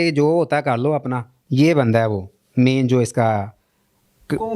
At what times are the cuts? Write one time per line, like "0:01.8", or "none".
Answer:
0:01.3

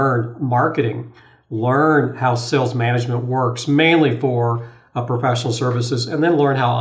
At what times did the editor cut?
none

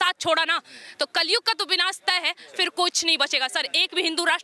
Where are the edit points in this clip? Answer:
none

